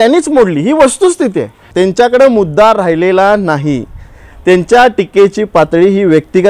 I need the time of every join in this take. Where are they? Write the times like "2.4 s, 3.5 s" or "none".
1.6 s